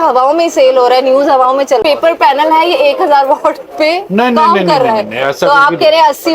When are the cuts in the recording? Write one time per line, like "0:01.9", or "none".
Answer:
0:01.8

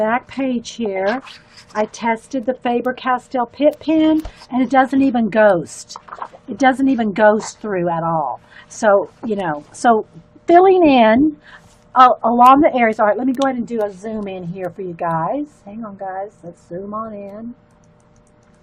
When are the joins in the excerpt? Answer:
0:09.4

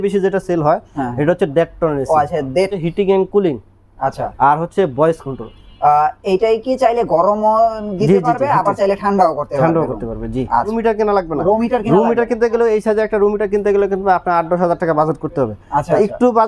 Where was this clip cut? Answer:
0:02.8
0:10.7

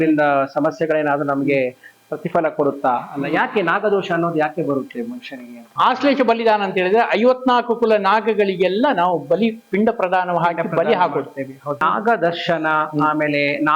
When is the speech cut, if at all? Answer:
0:05.7
0:11.8

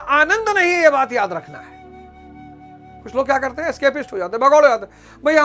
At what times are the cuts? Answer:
0:01.5
0:03.0

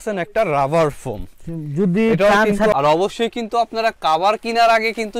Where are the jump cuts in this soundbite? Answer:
0:02.7

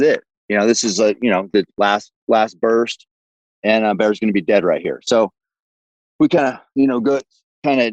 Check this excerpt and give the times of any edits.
none

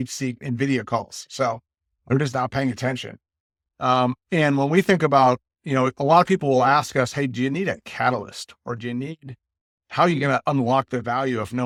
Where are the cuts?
none

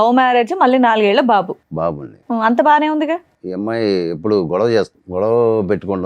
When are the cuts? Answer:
0:03.4
0:05.0

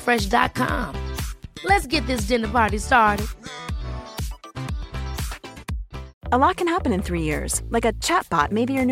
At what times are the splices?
0:06.1

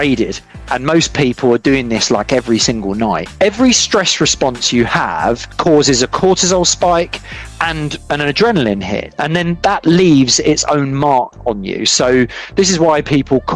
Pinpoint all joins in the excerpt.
0:03.3

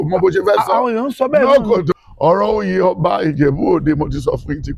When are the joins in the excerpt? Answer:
0:01.9

